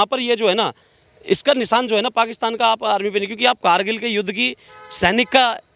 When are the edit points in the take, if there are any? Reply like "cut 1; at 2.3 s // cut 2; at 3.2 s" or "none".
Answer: none